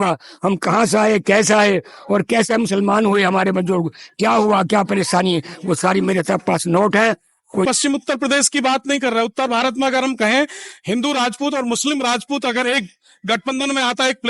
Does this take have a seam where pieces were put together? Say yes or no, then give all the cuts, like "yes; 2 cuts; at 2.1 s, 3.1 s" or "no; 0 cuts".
yes; 1 cut; at 7.7 s